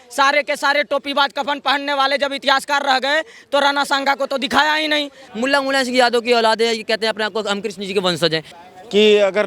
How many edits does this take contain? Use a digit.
2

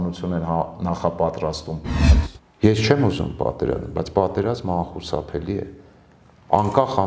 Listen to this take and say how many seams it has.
1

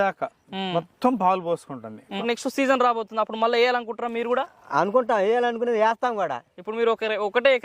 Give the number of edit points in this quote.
1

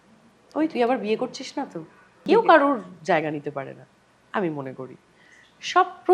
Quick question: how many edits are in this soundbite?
1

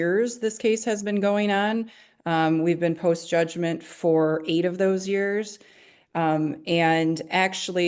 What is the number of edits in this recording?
0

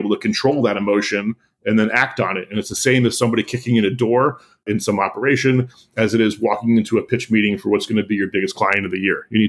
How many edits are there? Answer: 1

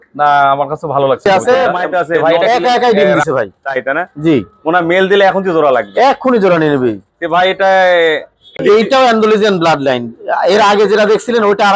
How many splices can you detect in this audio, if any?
2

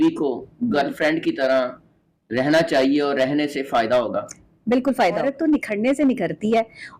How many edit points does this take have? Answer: 1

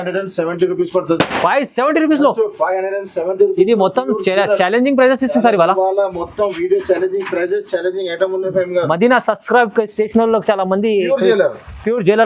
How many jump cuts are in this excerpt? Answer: 0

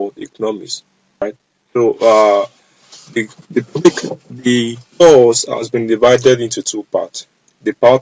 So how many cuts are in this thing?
1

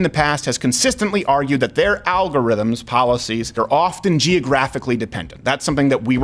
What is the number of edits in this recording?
1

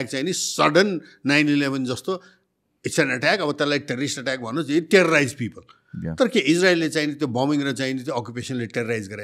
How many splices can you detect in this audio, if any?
0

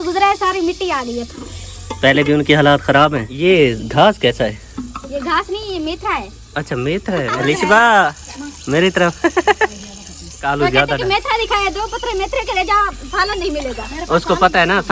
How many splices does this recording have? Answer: 4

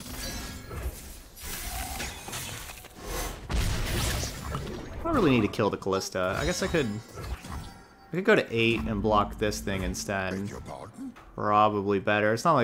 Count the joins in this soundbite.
1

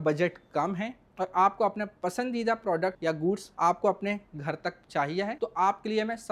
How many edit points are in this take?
0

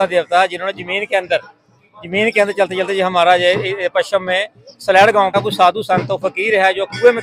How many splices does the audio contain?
1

